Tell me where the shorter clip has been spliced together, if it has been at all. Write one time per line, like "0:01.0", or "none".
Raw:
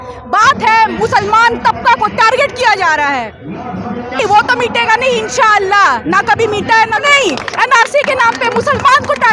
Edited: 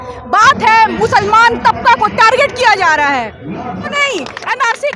0:03.9